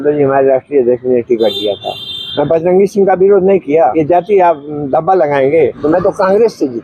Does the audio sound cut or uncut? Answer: cut